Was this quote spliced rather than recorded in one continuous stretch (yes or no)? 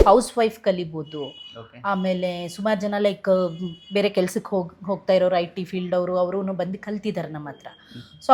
no